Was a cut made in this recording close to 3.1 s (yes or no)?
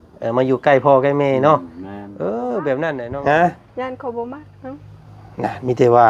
yes